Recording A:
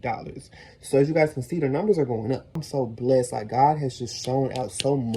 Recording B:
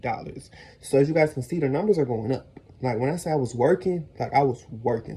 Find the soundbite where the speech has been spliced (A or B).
A